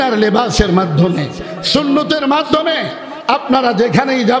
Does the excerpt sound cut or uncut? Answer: uncut